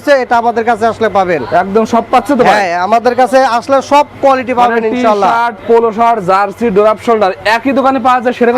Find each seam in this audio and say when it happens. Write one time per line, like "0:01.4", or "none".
none